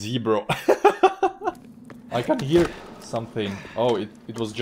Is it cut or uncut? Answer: cut